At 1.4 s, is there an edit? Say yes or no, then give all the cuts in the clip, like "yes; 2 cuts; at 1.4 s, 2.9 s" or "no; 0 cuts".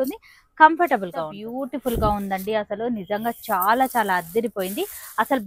yes; 1 cut; at 1.4 s